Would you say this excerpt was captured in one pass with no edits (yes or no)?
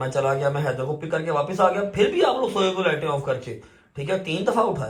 yes